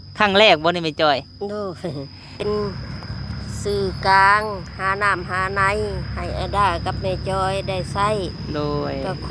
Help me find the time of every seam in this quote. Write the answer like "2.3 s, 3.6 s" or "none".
2.4 s